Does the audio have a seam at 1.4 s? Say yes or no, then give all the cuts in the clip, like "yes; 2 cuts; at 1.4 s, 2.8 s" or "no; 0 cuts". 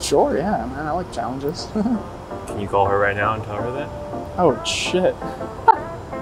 no; 0 cuts